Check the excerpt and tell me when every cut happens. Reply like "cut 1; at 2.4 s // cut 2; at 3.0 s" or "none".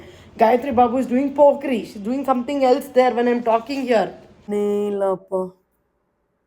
cut 1; at 4.5 s